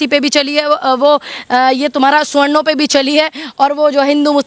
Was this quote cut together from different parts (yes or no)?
no